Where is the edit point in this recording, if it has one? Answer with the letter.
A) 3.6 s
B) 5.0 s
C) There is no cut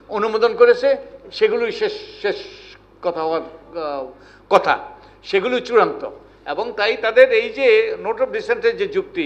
C